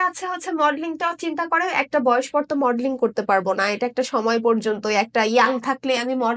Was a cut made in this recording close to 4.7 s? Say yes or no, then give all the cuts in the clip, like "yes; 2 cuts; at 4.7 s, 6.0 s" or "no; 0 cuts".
no; 0 cuts